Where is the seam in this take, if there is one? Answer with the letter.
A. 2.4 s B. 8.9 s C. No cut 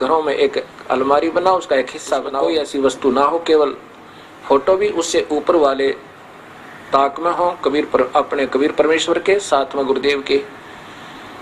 A